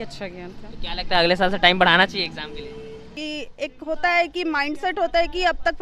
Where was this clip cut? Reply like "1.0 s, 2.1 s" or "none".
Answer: 3.1 s

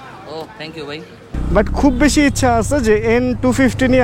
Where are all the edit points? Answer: 1.3 s

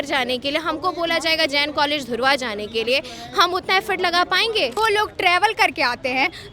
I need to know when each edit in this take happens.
4.8 s

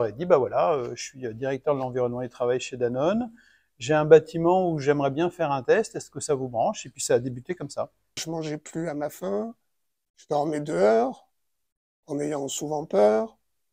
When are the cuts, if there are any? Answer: 8.2 s

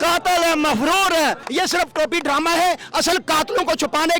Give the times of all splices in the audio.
1.4 s

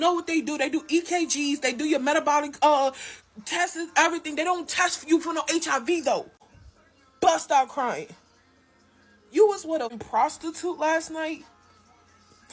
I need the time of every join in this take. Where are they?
6.3 s, 9.9 s

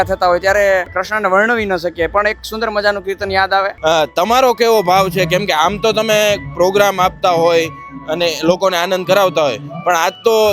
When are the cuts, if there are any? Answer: 1.0 s, 3.7 s

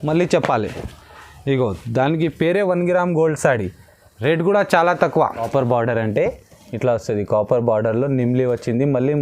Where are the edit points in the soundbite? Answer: 5.4 s

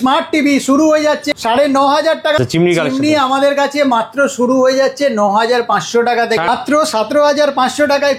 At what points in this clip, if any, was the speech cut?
1.2 s, 2.4 s, 6.5 s

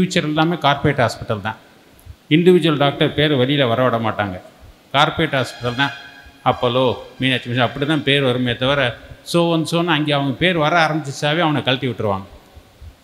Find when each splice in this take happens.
none

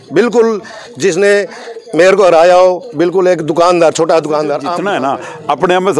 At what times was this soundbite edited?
4.7 s

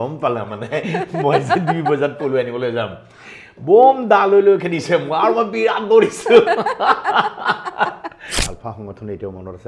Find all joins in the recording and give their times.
8.5 s

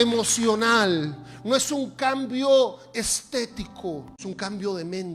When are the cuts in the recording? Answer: 4.1 s

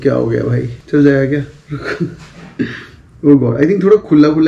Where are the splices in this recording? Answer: none

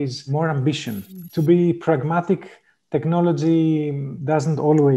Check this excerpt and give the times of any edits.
1.0 s, 4.1 s

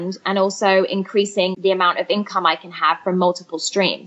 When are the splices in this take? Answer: 1.6 s

